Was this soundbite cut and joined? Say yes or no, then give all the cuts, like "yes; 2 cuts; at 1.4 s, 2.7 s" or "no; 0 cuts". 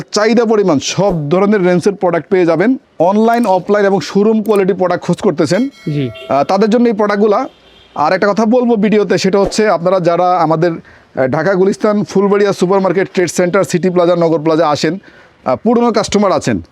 yes; 1 cut; at 2.9 s